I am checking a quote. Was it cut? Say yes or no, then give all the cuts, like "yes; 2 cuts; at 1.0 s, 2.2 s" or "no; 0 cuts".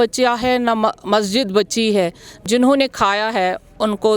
yes; 1 cut; at 2.4 s